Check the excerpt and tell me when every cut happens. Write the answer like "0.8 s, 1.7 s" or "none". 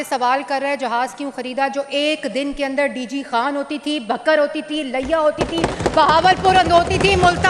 none